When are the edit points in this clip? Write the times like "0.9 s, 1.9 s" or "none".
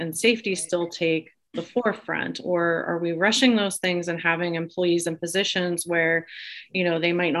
none